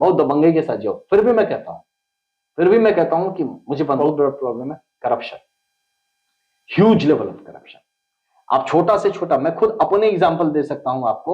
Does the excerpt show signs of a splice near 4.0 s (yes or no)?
yes